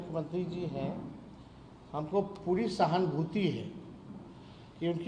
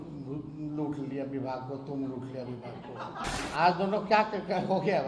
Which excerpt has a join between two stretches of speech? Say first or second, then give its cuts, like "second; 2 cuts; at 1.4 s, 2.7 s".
second; 1 cut; at 3.3 s